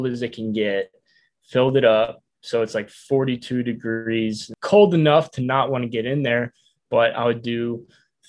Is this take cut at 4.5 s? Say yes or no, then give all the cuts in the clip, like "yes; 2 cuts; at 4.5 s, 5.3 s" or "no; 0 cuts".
yes; 1 cut; at 4.5 s